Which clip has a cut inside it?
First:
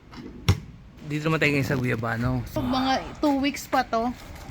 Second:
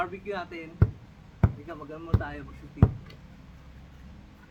first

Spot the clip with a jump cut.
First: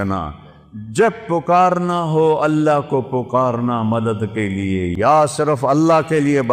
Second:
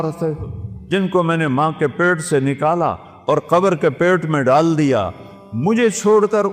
first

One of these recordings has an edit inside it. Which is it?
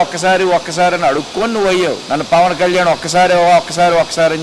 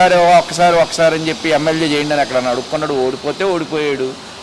first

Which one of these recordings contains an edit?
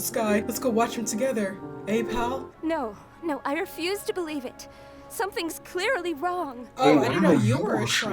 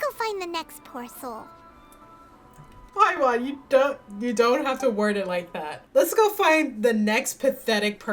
first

